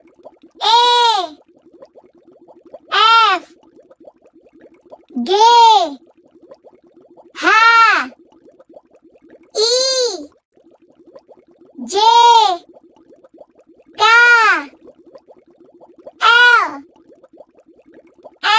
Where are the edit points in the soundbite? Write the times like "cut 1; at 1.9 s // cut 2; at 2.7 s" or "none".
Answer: none